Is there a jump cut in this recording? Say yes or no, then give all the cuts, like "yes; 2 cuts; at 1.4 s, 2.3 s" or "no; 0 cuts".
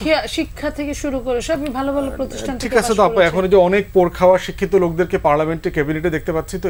no; 0 cuts